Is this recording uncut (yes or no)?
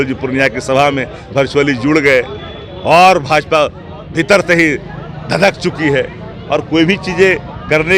yes